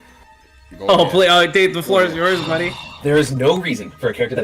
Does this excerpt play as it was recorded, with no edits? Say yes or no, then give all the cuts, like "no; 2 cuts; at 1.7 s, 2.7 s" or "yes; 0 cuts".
no; 1 cut; at 2.8 s